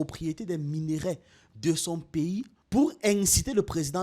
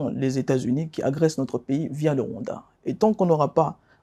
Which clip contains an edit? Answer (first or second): first